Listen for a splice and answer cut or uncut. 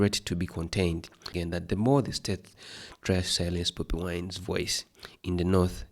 cut